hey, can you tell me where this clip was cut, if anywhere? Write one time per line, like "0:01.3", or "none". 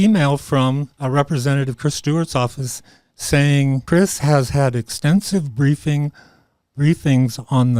0:00.9
0:03.8

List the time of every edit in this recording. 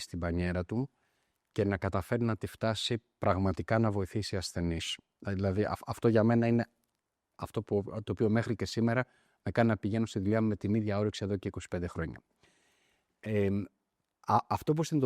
none

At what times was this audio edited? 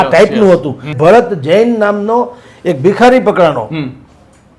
0:00.9

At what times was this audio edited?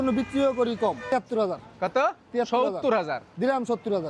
0:01.0

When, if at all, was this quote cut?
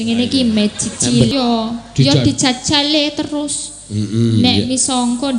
0:01.3

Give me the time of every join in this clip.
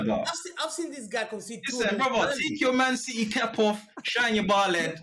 none

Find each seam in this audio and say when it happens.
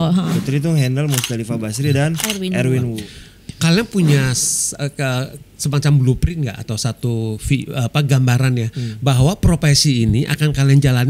0:03.0

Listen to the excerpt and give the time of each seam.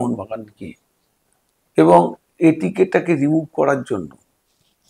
none

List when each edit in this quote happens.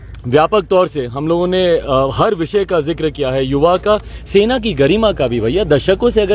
none

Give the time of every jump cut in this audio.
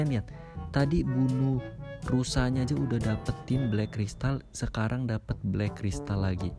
none

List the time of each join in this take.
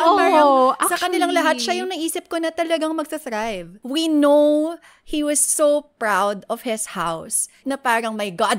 0:03.8
0:07.6

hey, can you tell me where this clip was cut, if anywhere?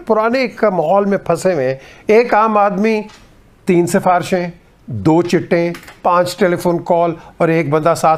none

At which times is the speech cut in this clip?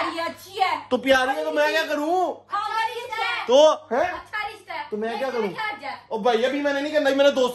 none

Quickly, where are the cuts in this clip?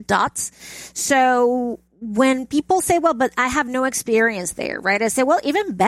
none

